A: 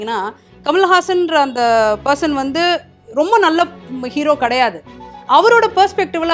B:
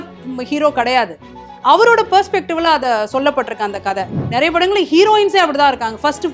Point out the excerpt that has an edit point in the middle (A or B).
B